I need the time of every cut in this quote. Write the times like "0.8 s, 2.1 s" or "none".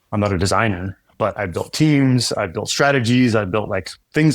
none